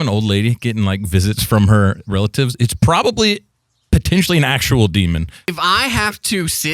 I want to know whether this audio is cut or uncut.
cut